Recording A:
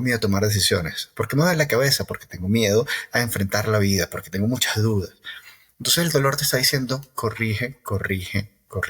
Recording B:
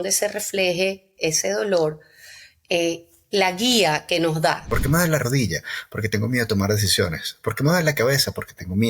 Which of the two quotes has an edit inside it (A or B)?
B